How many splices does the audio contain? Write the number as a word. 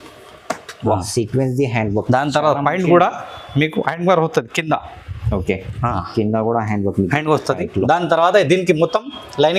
zero